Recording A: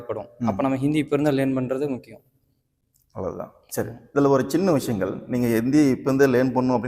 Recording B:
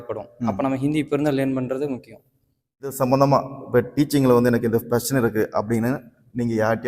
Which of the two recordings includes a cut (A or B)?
B